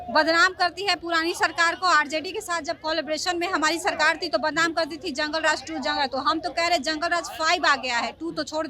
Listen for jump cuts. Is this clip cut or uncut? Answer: uncut